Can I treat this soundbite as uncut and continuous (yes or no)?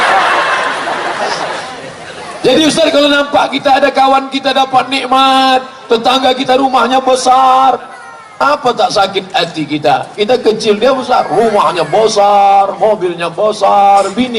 no